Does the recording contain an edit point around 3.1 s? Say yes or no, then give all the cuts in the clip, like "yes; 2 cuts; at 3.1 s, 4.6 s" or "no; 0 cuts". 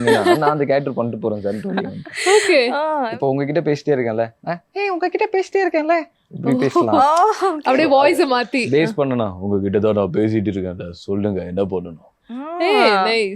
yes; 1 cut; at 3.1 s